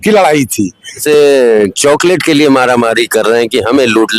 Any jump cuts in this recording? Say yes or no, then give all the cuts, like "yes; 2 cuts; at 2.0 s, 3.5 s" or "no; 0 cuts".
yes; 1 cut; at 1.0 s